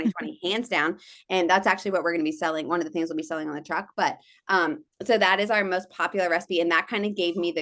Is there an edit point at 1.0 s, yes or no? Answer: no